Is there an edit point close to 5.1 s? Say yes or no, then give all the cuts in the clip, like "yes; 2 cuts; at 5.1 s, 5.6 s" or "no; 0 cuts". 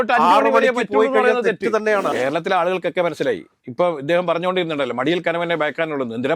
no; 1 cut; at 2.1 s